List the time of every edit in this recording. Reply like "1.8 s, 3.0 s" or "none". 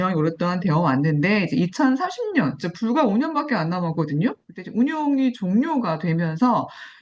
none